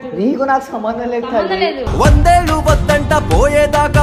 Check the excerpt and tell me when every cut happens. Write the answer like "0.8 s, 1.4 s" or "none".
1.8 s